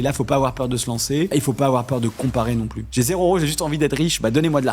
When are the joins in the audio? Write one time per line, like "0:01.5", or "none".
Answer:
0:01.3
0:02.8